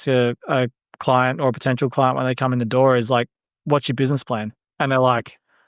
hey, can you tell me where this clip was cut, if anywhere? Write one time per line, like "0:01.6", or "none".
0:04.6